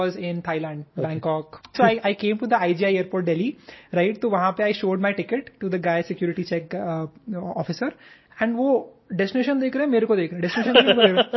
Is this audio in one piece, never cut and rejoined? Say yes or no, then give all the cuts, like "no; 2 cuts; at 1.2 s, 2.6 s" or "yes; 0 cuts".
no; 1 cut; at 1.7 s